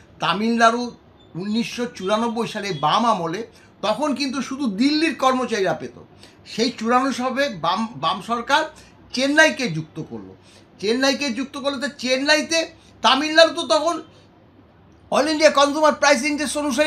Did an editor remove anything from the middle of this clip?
no; 0 cuts

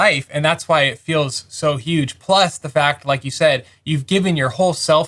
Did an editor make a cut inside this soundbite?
no; 0 cuts

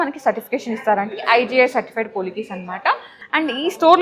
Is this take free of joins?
no; 1 cut; at 3.1 s

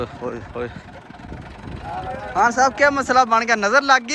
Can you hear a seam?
yes; 1 cut; at 1.2 s

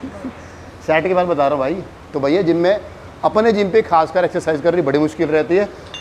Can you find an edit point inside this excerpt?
no; 0 cuts

